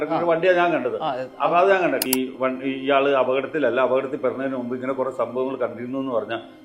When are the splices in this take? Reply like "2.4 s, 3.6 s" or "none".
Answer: 2.0 s